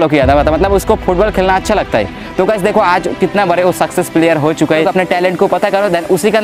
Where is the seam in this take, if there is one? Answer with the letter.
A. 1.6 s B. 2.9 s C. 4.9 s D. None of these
C